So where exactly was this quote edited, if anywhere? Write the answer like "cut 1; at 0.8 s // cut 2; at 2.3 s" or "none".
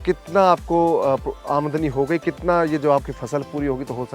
none